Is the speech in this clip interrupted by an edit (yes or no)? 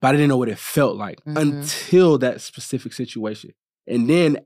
no